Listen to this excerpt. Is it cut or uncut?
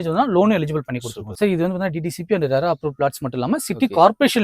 cut